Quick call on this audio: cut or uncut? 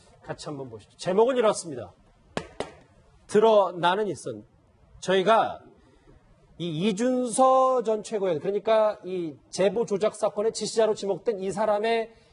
uncut